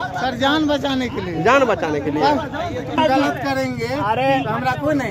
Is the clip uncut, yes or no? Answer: yes